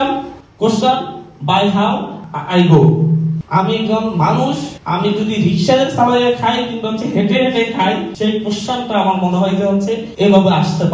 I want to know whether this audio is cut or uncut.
cut